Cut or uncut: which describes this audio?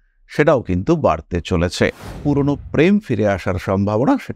cut